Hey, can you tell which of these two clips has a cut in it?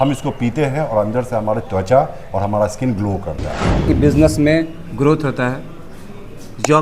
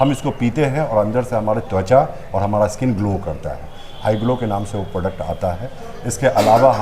first; 1 cut; at 3.8 s

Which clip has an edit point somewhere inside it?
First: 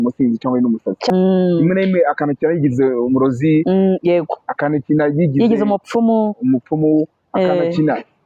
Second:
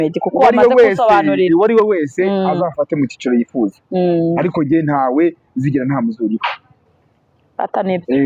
first; 1 cut; at 1.1 s

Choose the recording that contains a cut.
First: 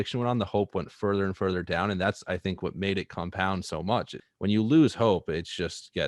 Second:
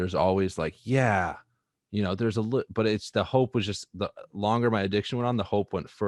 first; 1 cut; at 4.2 s

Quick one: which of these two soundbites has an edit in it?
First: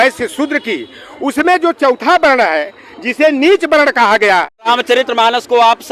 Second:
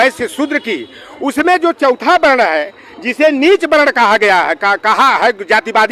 first; 1 cut; at 4.7 s

